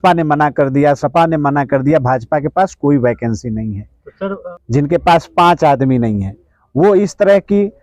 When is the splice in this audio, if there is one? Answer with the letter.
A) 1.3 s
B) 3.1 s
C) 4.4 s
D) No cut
C